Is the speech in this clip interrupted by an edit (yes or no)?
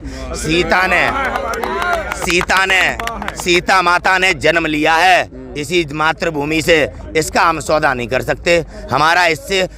no